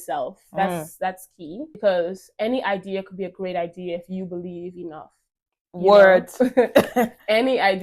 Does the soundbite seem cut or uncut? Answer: cut